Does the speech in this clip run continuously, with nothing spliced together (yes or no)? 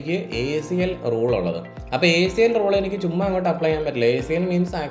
yes